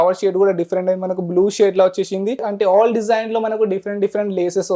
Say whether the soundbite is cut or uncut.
cut